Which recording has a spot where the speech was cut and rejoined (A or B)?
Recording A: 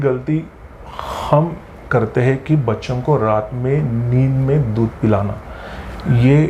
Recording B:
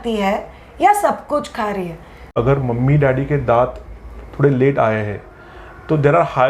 B